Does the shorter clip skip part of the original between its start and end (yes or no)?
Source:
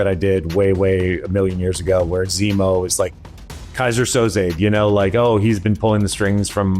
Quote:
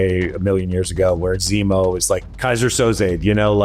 yes